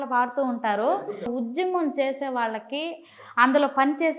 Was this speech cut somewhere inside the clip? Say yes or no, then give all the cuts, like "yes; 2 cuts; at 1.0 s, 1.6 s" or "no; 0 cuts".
yes; 1 cut; at 0.9 s